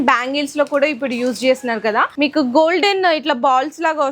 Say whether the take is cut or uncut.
cut